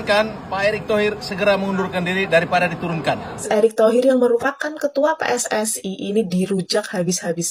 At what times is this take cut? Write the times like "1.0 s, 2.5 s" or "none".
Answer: 3.4 s